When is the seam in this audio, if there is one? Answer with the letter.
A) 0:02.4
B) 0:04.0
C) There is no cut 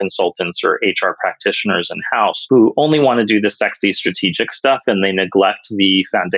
A